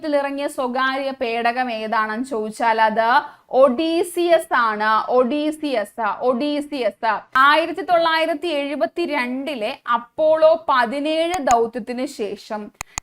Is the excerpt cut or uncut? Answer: cut